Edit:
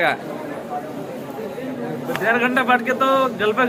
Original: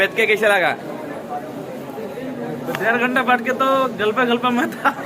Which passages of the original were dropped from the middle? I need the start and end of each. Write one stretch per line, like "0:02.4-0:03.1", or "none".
none